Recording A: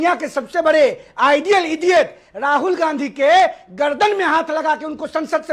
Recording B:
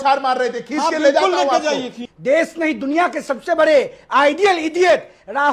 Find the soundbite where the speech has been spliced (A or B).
B